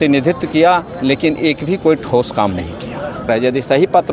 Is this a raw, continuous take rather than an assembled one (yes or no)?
no